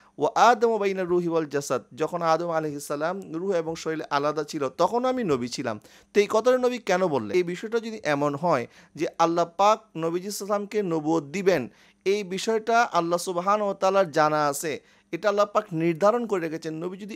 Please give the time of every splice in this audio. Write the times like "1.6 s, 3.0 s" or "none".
7.3 s